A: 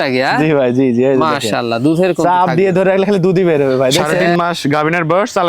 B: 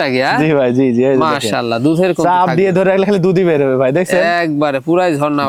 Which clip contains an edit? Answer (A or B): A